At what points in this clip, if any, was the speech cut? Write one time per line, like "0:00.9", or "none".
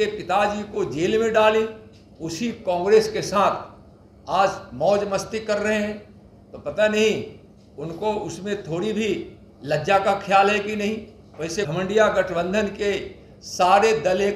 0:11.7